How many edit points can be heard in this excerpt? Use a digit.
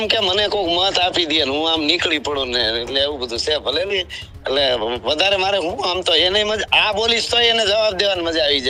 0